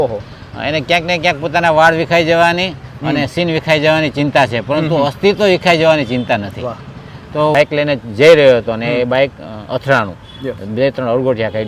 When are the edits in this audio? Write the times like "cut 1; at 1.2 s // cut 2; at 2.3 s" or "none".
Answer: cut 1; at 7.5 s

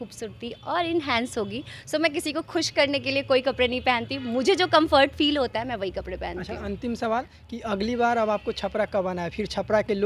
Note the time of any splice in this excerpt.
none

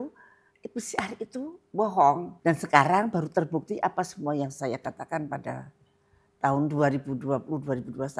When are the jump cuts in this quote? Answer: cut 1; at 2.3 s

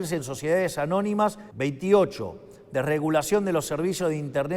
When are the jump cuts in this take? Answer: cut 1; at 1.5 s

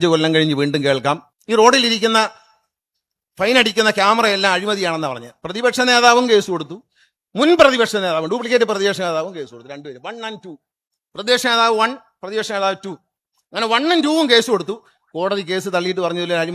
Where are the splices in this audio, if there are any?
cut 1; at 1.3 s

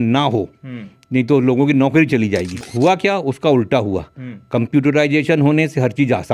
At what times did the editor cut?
cut 1; at 2.6 s

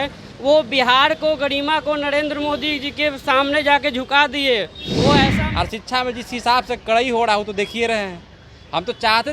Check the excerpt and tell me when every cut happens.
cut 1; at 5.3 s

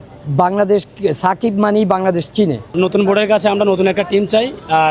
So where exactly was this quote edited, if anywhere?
cut 1; at 2.8 s

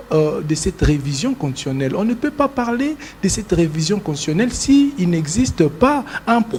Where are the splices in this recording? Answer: none

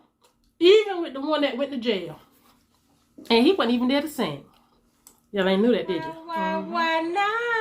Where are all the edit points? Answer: cut 1; at 6.1 s

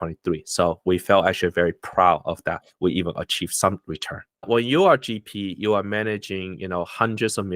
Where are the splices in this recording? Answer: cut 1; at 4.5 s

